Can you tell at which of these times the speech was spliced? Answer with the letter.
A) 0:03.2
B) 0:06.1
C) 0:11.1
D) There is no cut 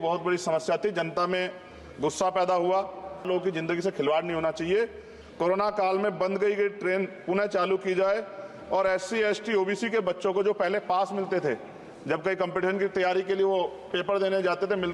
A